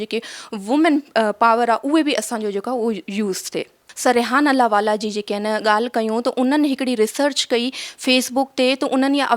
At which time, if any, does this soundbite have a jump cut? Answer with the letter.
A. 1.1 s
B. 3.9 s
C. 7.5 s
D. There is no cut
B